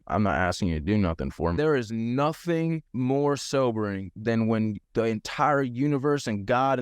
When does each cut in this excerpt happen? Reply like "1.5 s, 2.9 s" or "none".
1.6 s